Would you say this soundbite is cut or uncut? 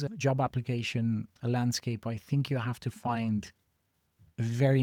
uncut